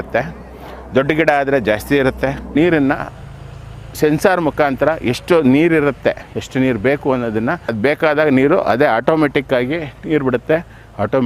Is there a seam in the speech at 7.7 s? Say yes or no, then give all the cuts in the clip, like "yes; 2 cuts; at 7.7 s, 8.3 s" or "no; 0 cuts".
yes; 2 cuts; at 2.5 s, 7.7 s